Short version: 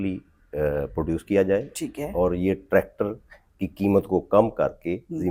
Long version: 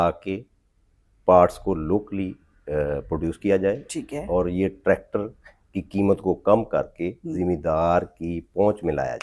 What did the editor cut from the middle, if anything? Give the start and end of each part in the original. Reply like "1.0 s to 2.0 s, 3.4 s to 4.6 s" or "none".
none